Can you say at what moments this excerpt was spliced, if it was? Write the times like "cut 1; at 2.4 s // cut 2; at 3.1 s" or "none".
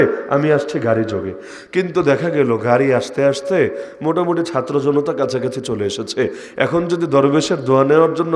none